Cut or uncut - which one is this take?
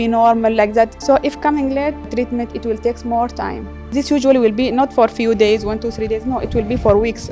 cut